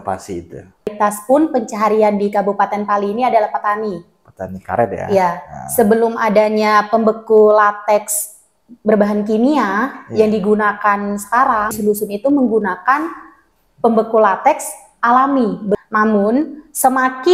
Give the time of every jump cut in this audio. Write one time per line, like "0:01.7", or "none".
0:00.9
0:11.7
0:15.8